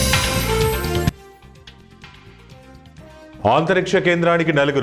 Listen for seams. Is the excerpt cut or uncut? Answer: uncut